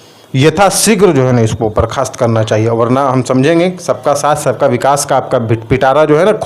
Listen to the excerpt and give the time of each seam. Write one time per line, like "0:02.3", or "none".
none